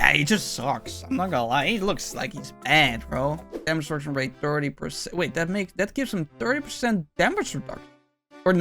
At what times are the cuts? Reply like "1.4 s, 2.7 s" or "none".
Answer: 3.5 s